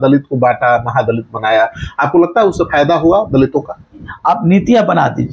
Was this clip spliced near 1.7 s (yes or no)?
no